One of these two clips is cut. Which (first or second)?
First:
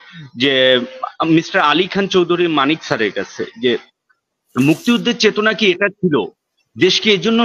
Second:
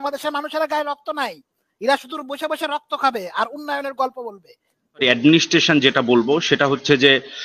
second